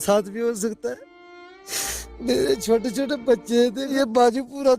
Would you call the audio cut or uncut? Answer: cut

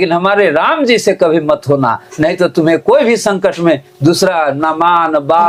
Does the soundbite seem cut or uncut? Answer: uncut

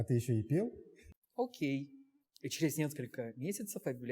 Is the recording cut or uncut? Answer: cut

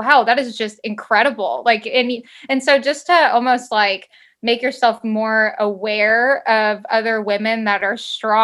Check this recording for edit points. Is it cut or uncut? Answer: uncut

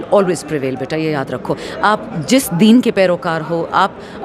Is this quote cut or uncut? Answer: uncut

